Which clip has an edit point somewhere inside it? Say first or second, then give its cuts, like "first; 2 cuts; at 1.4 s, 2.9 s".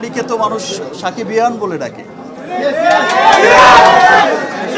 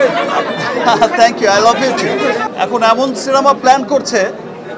second; 1 cut; at 2.4 s